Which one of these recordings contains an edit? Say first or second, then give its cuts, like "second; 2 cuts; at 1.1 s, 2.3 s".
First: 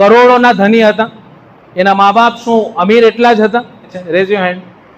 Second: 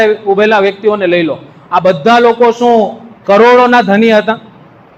first; 1 cut; at 4.0 s